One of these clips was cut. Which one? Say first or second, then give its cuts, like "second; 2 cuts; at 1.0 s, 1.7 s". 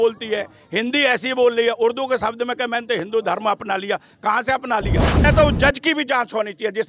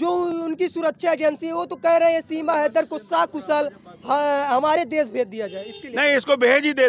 first; 1 cut; at 5.2 s